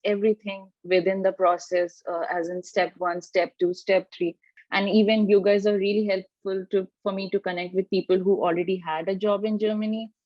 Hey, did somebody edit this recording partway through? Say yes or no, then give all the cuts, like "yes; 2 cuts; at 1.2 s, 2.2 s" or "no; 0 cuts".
yes; 1 cut; at 4.5 s